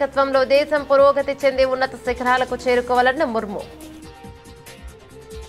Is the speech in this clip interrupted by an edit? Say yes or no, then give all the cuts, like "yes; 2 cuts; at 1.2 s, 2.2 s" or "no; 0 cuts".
no; 0 cuts